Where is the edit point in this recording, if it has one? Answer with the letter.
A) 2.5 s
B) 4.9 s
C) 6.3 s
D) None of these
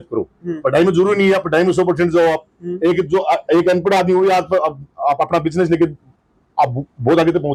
D